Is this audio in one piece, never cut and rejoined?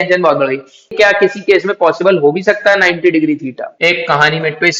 no; 2 cuts; at 0.9 s, 3.6 s

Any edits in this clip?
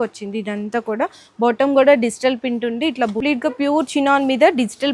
yes; 1 cut; at 3.2 s

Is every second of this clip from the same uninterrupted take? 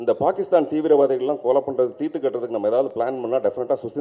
yes; 0 cuts

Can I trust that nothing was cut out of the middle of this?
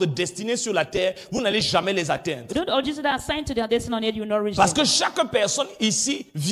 yes; 0 cuts

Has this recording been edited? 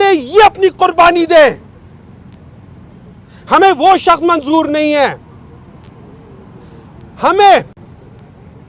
no; 0 cuts

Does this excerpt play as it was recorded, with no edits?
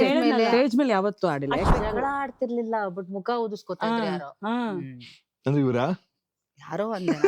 no; 1 cut; at 1.7 s

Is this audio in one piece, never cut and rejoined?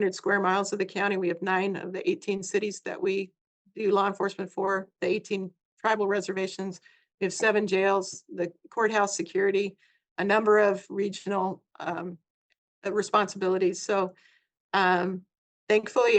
yes; 0 cuts

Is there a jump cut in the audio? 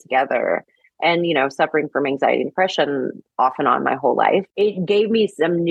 yes; 1 cut; at 4.5 s

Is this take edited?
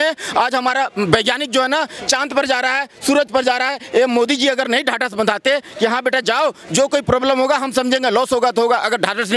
no; 0 cuts

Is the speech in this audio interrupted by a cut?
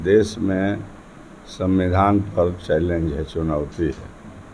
no; 0 cuts

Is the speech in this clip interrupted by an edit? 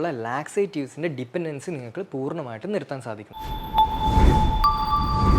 yes; 1 cut; at 3.4 s

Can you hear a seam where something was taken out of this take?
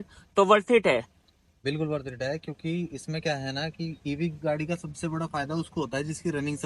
no; 0 cuts

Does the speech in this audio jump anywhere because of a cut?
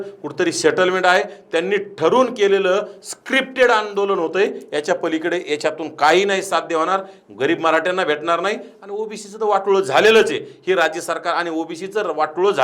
no; 0 cuts

